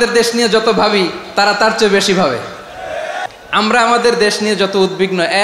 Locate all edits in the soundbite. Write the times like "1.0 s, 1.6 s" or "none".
3.3 s